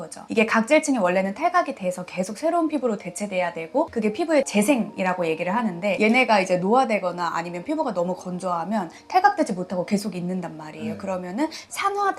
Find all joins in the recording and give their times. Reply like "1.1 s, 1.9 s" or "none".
4.9 s